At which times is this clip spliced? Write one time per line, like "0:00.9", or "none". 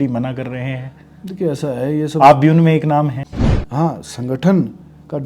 0:03.2